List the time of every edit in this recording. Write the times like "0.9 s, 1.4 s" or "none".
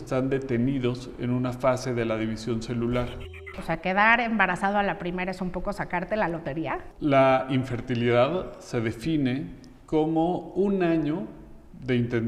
3.5 s, 6.8 s